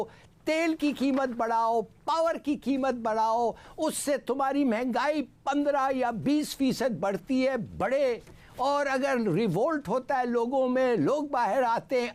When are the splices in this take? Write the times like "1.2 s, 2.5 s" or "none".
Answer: none